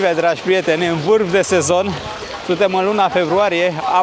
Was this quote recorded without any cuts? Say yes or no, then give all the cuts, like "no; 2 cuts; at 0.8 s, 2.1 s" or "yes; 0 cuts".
yes; 0 cuts